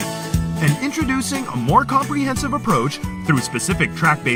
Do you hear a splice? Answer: no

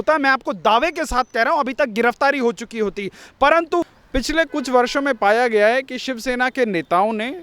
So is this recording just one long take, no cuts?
no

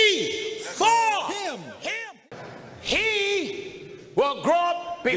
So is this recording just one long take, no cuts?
no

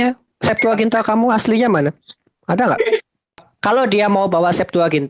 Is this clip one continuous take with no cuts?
no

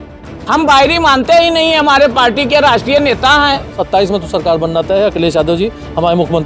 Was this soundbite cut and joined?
yes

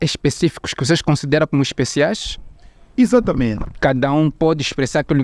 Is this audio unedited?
no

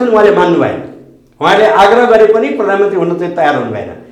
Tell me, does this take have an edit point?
no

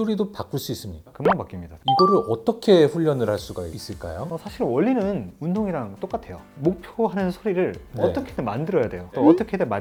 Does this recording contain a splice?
no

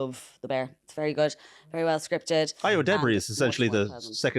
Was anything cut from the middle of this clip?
yes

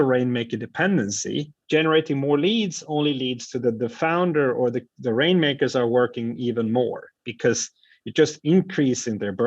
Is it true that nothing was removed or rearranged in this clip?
no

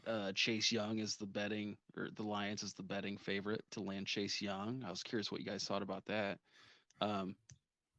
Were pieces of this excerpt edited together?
no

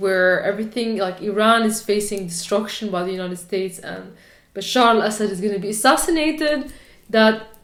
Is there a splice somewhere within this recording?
no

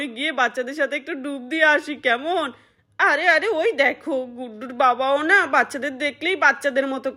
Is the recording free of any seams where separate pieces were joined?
yes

